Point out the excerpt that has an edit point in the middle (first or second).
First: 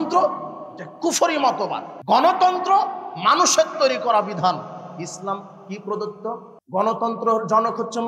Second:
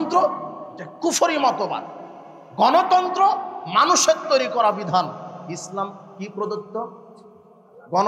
first